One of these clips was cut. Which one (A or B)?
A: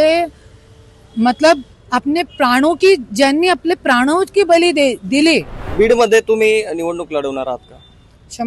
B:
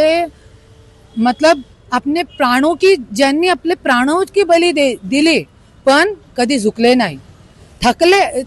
A